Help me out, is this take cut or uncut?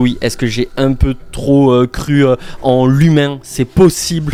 uncut